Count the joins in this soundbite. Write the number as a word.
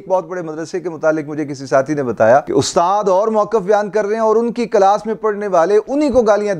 zero